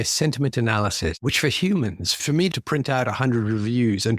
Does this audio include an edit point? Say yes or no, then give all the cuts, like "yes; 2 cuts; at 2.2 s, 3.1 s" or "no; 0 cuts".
yes; 2 cuts; at 1.2 s, 2.5 s